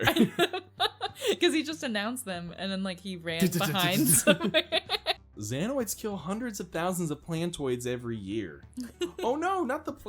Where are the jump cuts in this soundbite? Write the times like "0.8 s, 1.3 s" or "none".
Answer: 5.2 s